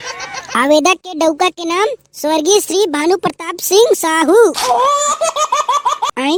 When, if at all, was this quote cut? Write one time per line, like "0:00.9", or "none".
none